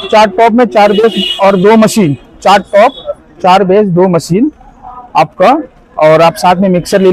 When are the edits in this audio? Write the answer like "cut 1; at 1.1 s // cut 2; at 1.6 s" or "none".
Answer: none